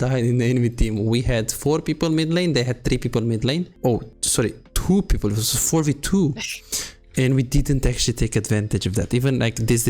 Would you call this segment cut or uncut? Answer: cut